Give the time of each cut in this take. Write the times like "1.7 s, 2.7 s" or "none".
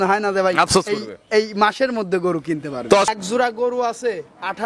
3.1 s